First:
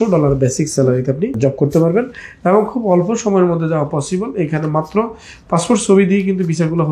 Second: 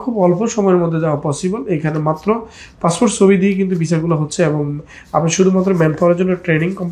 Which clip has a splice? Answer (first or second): first